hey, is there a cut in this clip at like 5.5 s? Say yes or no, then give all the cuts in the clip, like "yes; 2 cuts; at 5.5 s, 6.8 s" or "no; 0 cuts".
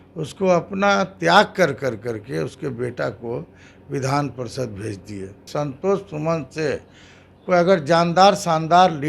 yes; 1 cut; at 5.5 s